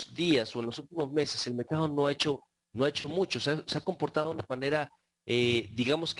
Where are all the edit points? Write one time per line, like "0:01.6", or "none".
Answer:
0:04.7